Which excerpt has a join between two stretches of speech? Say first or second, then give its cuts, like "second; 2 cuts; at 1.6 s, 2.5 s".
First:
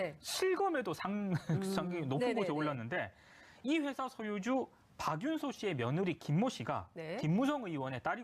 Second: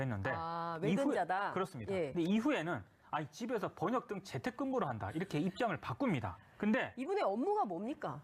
second; 1 cut; at 2.1 s